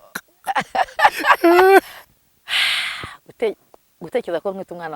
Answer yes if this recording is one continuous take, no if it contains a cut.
no